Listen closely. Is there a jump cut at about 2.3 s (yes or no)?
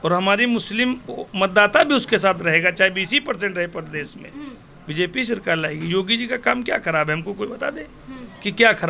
no